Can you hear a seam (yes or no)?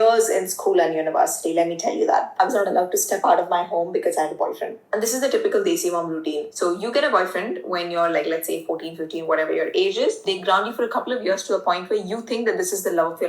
yes